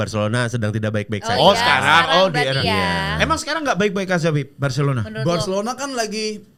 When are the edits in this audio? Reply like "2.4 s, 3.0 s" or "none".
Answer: none